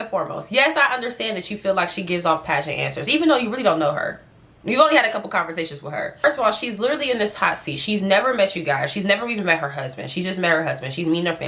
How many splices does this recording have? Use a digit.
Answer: 1